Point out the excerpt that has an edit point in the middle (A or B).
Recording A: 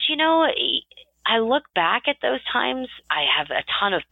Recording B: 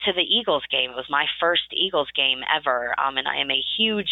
A